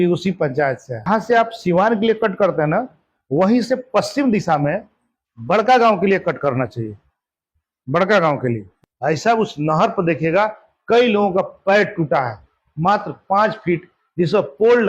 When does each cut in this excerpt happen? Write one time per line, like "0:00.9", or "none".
0:01.1
0:08.7

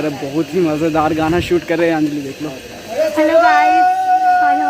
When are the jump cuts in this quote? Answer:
none

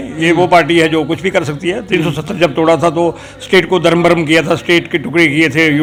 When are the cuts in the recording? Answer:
none

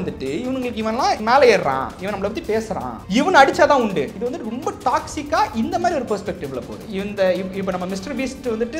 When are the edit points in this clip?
0:01.2
0:03.0
0:04.1
0:06.8

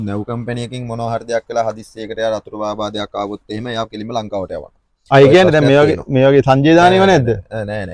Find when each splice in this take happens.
none

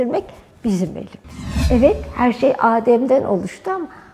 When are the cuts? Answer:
0:01.5

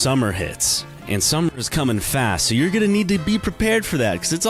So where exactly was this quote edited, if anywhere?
0:00.9

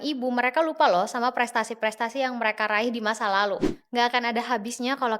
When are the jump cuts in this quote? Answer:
0:03.8

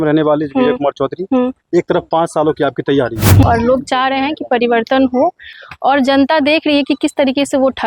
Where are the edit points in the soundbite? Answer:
0:03.4
0:05.5

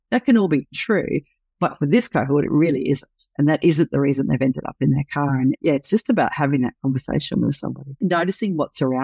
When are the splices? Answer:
0:08.0

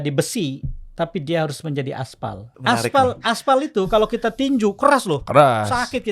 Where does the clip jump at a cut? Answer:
0:02.5

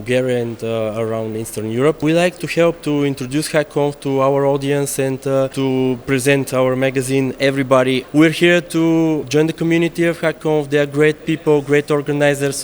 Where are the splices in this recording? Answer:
0:02.0
0:05.5
0:08.0

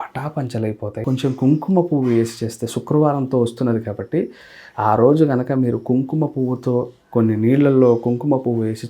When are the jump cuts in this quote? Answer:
0:01.0

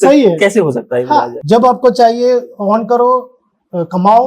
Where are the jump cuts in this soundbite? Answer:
0:01.3

